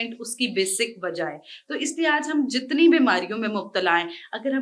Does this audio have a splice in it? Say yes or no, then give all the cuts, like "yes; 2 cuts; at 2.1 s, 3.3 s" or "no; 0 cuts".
no; 0 cuts